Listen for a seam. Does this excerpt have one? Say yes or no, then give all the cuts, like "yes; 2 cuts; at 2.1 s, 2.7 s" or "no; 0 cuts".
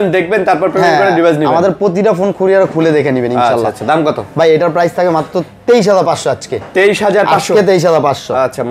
no; 0 cuts